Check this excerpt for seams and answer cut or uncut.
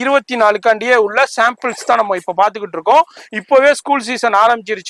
uncut